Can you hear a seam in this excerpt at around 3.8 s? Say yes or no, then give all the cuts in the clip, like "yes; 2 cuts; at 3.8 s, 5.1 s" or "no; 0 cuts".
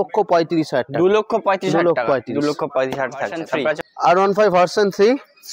yes; 1 cut; at 3.8 s